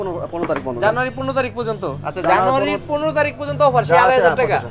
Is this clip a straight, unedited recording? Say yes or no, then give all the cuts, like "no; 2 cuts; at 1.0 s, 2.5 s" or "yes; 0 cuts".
yes; 0 cuts